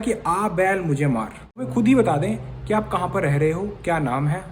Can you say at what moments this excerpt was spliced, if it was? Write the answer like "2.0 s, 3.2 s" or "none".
1.7 s